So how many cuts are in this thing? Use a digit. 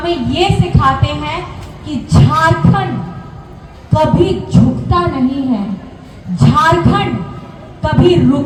0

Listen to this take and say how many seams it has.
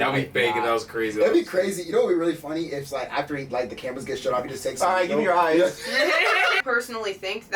1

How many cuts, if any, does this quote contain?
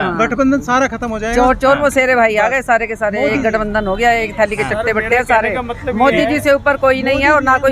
0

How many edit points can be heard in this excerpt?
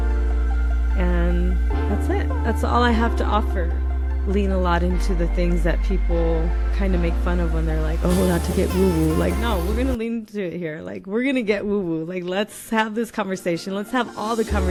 0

